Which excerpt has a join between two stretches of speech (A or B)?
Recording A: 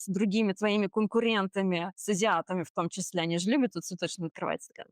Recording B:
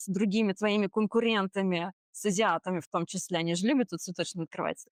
A